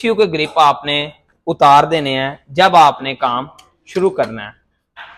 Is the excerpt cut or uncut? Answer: uncut